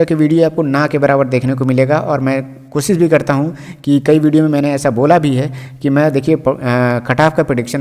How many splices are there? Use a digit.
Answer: 0